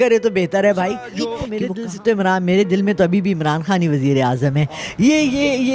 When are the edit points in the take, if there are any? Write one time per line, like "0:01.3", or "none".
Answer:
0:01.4